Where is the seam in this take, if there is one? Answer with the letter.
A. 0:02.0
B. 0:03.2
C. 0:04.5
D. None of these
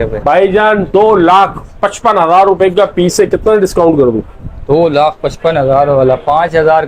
D